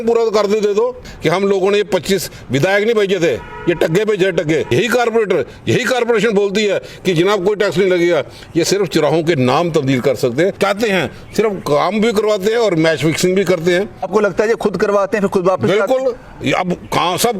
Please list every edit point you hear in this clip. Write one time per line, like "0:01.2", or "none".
0:01.1
0:04.7
0:10.5
0:14.1